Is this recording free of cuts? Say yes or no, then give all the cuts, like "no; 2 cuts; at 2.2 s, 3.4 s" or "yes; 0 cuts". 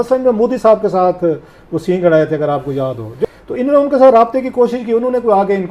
no; 1 cut; at 3.1 s